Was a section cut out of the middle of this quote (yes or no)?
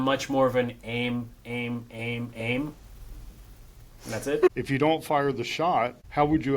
yes